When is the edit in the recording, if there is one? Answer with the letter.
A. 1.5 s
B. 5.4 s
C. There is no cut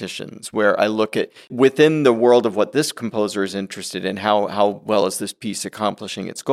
A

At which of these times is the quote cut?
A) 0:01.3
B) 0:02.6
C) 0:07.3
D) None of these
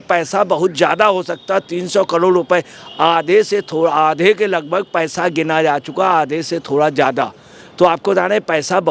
D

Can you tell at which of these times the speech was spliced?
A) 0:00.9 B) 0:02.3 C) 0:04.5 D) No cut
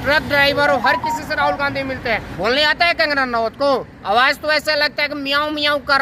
B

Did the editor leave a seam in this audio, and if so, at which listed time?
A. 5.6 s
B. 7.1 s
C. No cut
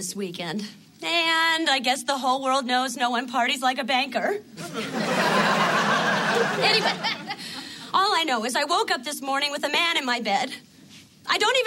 A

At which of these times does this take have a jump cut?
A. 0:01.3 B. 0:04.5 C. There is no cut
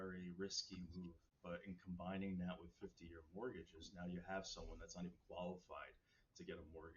A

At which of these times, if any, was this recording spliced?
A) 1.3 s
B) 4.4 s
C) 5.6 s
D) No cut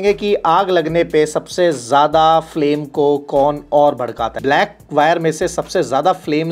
B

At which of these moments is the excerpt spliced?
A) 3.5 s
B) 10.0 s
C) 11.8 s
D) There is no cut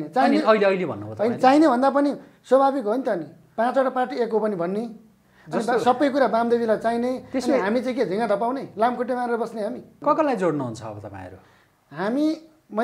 B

